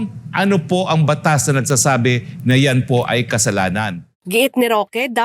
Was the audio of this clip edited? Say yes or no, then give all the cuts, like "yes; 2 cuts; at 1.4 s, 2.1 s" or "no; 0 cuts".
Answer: no; 0 cuts